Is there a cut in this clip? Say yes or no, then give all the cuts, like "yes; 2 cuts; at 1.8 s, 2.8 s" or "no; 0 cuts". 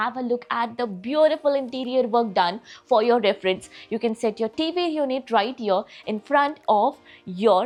no; 0 cuts